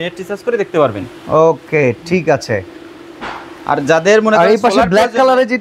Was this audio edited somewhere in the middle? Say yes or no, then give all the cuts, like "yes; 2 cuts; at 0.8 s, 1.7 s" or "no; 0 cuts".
no; 0 cuts